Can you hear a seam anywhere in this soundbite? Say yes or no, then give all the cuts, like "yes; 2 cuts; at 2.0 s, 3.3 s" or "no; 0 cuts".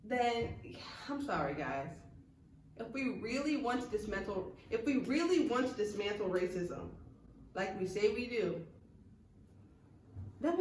no; 0 cuts